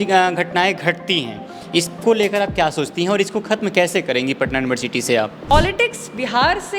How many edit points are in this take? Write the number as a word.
one